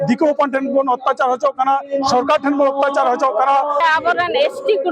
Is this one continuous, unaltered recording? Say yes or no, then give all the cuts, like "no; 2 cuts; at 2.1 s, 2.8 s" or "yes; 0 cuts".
no; 1 cut; at 3.8 s